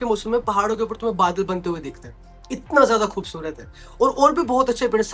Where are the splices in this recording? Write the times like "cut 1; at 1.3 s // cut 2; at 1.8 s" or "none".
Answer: none